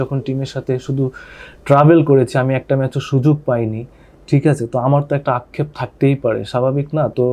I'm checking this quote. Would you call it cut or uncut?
uncut